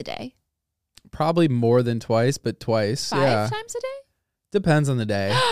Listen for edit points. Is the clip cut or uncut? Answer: uncut